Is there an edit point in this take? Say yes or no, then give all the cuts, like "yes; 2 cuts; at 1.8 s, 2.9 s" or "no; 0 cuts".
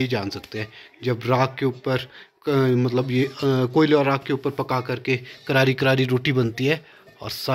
no; 0 cuts